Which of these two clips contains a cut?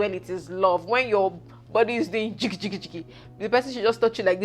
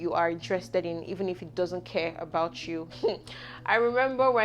second; 1 cut; at 2.9 s

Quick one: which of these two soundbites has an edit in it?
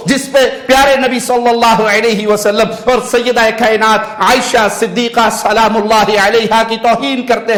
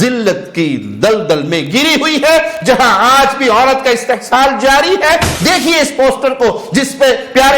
second; 1 cut; at 5.3 s

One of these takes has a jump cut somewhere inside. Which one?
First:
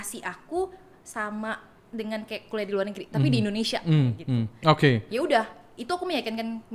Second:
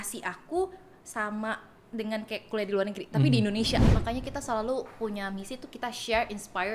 second; 1 cut; at 3.8 s

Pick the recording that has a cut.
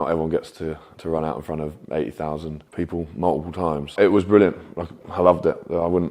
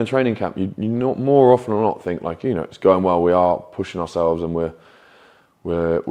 first; 2 cuts; at 2.6 s, 3.9 s

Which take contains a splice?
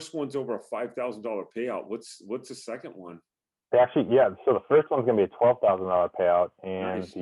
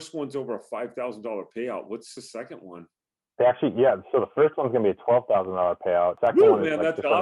second; 2 cuts; at 2.2 s, 6.2 s

